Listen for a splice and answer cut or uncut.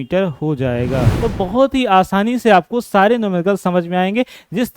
cut